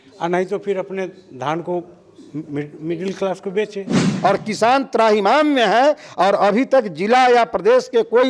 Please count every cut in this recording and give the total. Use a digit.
1